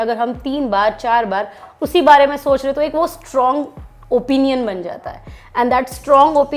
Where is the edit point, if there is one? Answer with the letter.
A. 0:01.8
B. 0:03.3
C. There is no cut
C